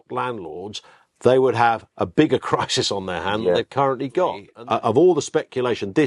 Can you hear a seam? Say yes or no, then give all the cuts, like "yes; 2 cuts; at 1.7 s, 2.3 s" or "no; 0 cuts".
yes; 1 cut; at 4.5 s